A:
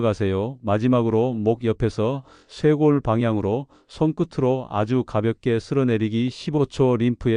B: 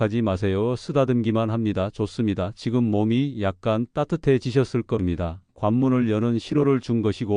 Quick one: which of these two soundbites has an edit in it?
B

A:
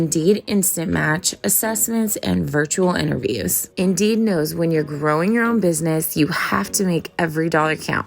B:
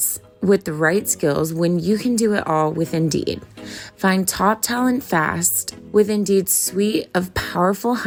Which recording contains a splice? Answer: A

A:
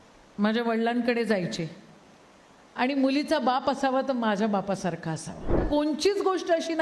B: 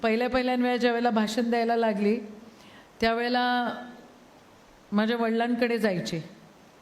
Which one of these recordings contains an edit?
A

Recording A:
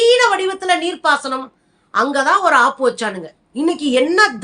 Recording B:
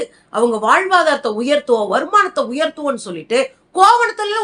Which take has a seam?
A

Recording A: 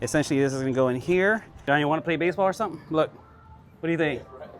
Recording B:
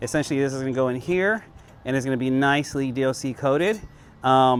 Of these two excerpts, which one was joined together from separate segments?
A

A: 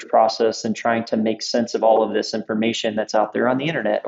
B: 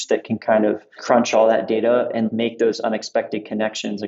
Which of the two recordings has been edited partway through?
B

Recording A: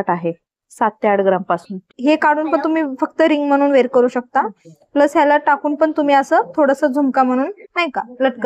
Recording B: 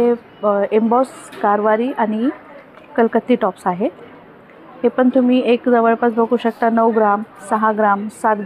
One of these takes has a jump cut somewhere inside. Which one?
A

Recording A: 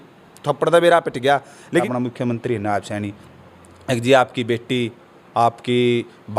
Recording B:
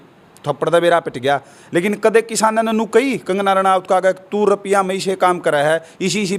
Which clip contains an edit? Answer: A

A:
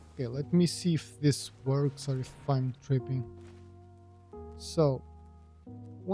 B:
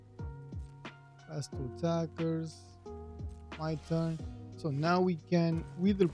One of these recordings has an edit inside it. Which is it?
B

